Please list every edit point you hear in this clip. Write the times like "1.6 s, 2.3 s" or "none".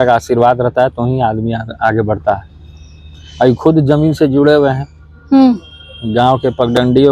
none